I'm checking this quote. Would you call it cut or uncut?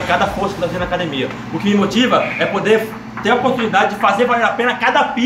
uncut